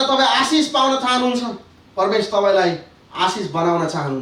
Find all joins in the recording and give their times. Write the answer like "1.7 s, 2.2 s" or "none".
none